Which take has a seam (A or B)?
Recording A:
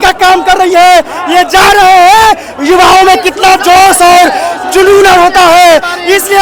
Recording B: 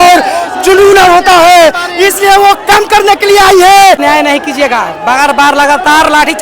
B